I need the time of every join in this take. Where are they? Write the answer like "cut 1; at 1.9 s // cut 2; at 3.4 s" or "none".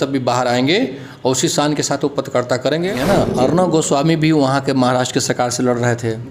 cut 1; at 2.9 s

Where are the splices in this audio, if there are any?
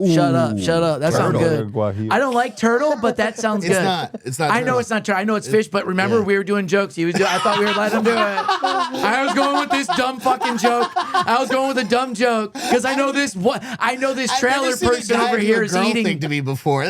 cut 1; at 2.0 s // cut 2; at 12.6 s

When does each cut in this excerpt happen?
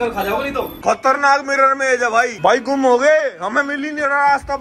cut 1; at 2.3 s

